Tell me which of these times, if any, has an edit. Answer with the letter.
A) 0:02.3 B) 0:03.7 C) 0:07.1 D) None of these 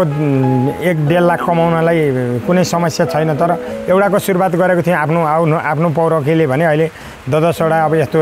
B